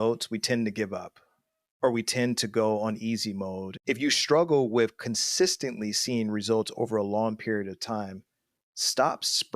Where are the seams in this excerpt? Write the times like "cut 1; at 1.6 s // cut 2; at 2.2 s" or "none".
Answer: cut 1; at 3.7 s